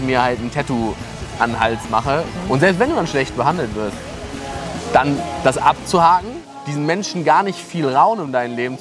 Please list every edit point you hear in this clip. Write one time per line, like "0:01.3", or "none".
0:02.3